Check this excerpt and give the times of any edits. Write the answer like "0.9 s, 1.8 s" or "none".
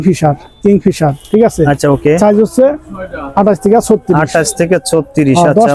none

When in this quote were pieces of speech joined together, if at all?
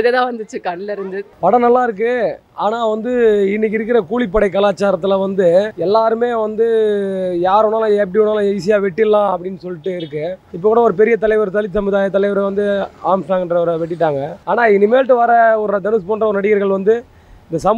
1.3 s, 5.7 s, 10.4 s, 14.3 s

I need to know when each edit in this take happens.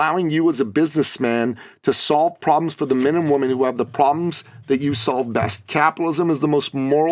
none

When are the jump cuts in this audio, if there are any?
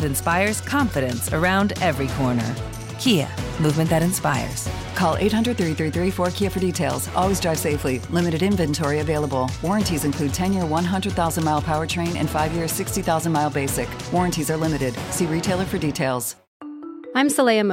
16.4 s

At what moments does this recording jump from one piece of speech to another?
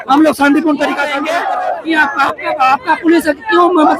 1.1 s

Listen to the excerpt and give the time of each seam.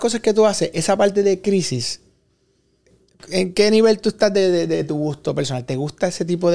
none

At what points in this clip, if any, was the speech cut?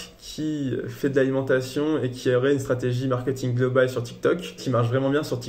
4.6 s

